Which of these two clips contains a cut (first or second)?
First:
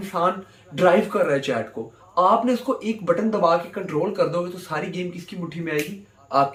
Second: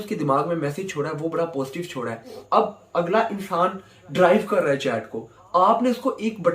second